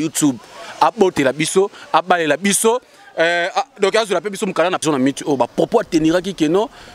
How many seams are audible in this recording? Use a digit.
1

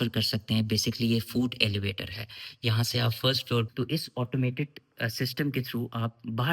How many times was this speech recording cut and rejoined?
1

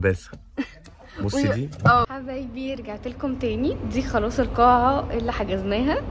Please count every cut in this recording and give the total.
1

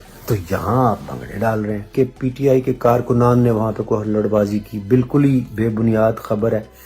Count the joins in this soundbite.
1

